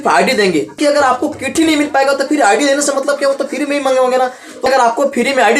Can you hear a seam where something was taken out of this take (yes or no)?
yes